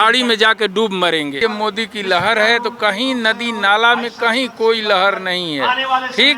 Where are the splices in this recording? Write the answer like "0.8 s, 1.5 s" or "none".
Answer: 1.4 s

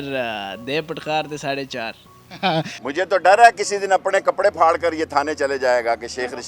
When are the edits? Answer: none

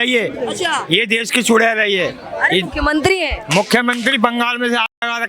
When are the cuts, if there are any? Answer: none

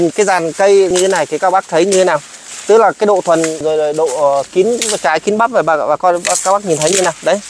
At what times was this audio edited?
0.9 s, 3.6 s

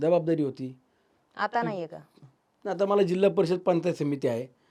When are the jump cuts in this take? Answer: none

